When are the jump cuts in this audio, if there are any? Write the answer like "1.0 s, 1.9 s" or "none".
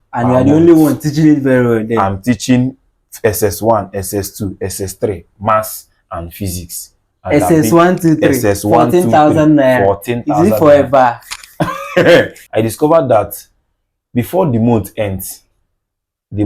12.4 s